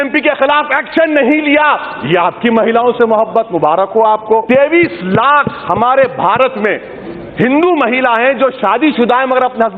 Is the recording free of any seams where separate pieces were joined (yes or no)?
no